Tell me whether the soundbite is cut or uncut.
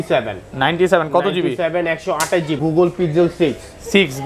cut